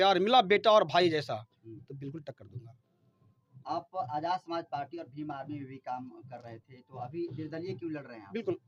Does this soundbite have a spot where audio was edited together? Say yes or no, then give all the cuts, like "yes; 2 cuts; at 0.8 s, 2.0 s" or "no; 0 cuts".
no; 0 cuts